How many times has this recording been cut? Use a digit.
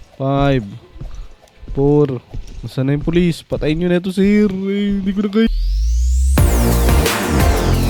1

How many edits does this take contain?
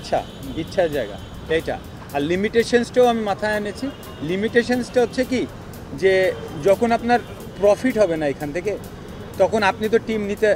0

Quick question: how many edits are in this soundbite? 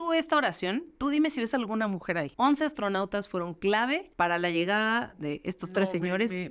0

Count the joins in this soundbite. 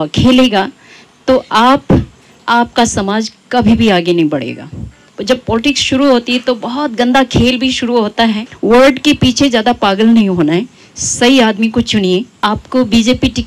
3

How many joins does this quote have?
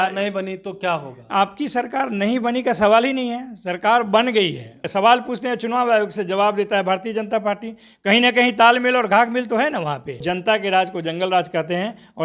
2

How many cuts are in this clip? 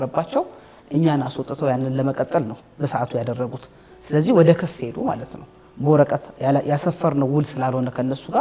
0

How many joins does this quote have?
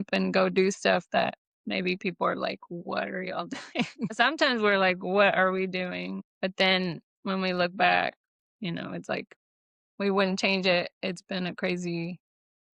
2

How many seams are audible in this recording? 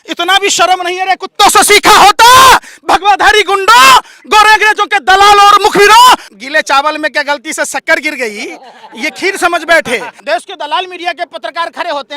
2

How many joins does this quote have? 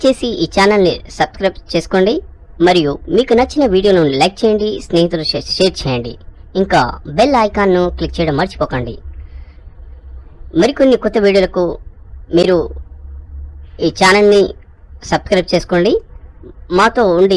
1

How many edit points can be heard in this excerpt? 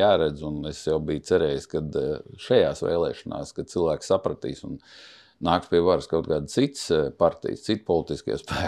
0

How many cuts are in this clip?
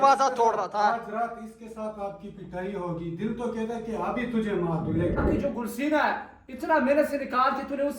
1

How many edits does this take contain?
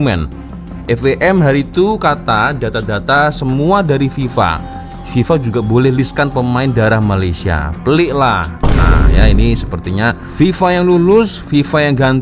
1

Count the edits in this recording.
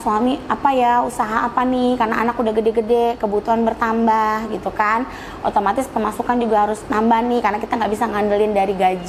0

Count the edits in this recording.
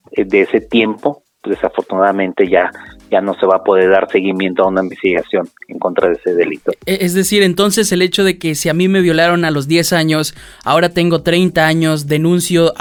0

